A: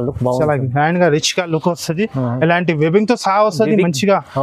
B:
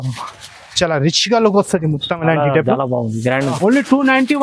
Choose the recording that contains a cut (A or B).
B